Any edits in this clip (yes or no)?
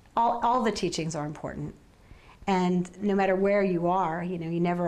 no